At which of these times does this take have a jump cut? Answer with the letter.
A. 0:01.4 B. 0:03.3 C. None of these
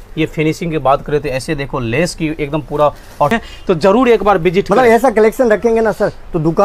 B